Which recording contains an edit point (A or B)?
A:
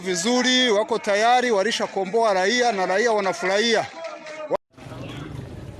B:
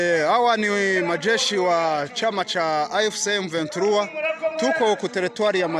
A